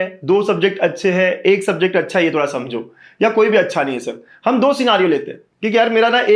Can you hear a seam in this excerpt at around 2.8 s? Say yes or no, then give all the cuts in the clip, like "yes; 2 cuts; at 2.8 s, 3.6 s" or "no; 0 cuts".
no; 0 cuts